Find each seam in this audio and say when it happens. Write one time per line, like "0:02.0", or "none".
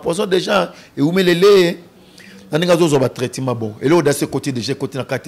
none